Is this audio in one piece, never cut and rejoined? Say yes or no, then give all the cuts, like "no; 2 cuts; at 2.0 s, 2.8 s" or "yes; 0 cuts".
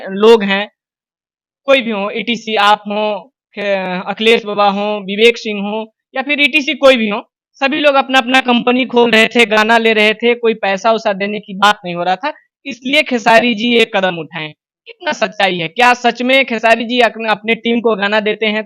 yes; 0 cuts